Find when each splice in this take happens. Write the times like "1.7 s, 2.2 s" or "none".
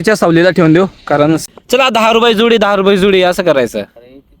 1.4 s